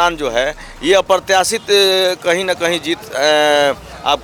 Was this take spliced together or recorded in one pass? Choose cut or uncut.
uncut